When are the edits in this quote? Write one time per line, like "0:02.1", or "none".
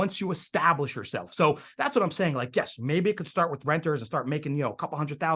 none